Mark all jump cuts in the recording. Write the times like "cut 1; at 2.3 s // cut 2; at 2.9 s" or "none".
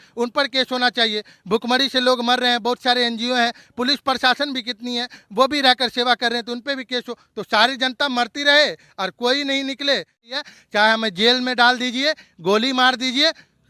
cut 1; at 10.3 s